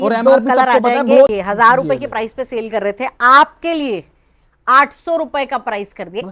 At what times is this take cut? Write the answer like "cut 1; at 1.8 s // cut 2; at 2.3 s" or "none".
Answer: cut 1; at 1.3 s